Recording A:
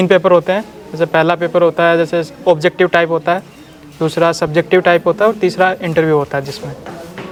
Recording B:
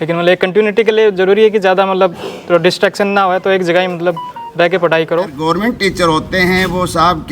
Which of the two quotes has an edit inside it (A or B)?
B